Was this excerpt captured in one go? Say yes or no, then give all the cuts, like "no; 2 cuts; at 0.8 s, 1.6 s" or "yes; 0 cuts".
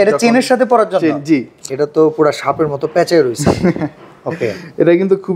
no; 1 cut; at 1.5 s